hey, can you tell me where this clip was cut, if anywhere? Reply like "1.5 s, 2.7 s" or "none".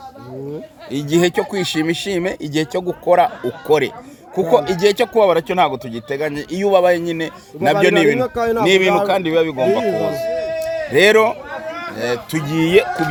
none